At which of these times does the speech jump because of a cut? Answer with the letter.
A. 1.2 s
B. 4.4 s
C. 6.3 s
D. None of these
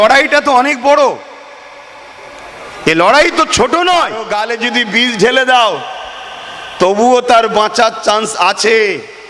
B